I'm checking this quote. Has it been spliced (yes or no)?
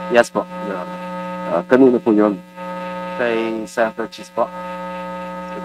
no